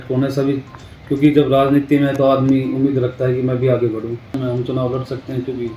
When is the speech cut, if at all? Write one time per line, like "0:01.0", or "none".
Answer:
0:04.4